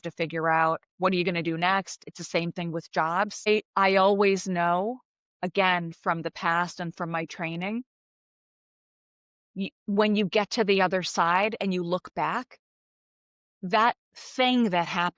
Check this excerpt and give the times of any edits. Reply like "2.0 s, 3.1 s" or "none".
0.9 s, 2.0 s, 3.5 s